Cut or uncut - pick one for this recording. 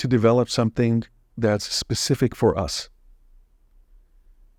uncut